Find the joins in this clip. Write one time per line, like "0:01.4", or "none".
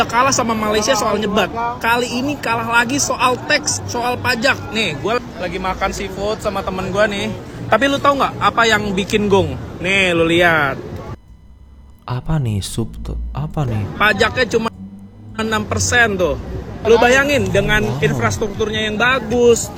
none